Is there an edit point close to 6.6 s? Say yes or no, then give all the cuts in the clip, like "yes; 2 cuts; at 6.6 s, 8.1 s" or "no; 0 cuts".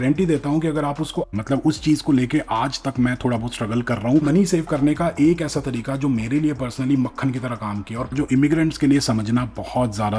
no; 3 cuts; at 1.3 s, 4.2 s, 8.1 s